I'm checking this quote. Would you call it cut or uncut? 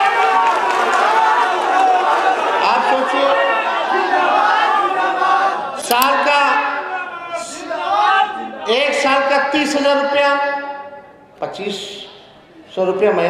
uncut